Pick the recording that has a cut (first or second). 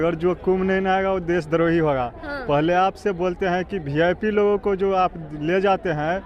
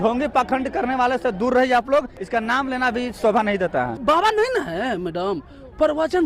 second